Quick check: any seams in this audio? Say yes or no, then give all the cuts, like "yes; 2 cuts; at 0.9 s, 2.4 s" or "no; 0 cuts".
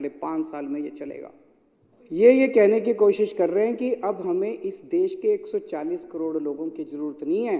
no; 0 cuts